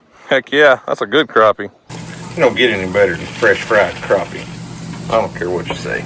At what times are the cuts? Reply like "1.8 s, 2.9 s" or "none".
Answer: 1.8 s